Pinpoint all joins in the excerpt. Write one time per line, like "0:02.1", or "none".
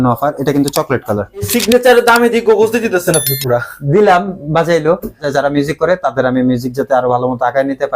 0:01.5
0:05.2